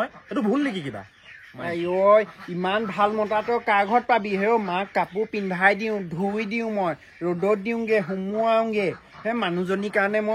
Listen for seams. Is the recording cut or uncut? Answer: uncut